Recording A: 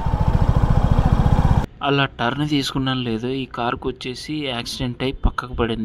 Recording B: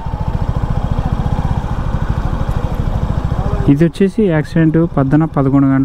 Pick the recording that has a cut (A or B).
A